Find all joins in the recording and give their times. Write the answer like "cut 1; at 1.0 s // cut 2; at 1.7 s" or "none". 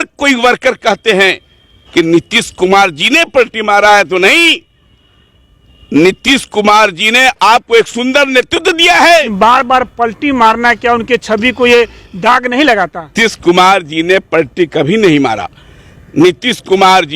cut 1; at 9.3 s // cut 2; at 13.1 s